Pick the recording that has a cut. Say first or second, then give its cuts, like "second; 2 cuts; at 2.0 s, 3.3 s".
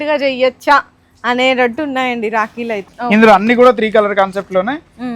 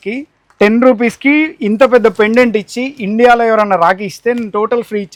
first; 1 cut; at 2.9 s